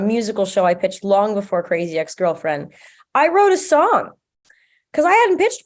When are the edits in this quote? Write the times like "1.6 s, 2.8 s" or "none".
none

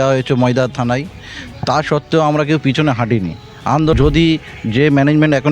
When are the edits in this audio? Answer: 3.9 s

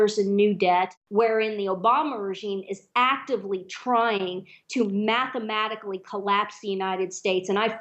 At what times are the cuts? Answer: 1.0 s

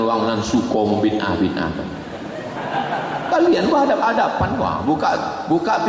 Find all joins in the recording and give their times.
2.6 s

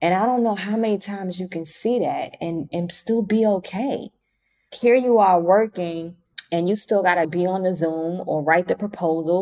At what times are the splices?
4.7 s

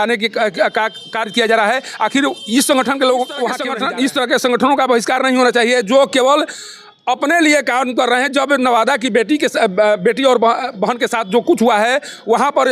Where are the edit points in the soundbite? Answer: 3.7 s

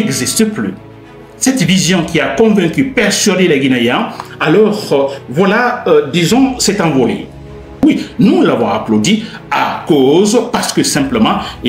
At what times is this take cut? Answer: 7.8 s

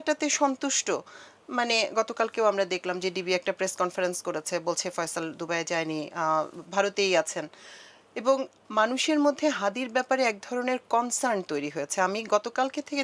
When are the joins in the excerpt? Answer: none

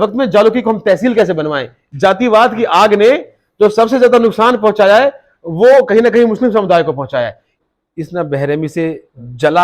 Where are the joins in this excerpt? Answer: 1.9 s, 7.5 s

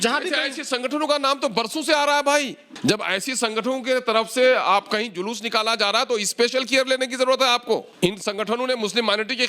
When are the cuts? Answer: 2.6 s, 7.9 s

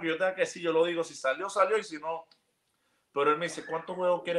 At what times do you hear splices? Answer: none

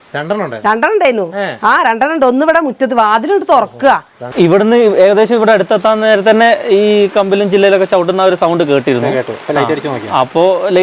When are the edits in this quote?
4.2 s

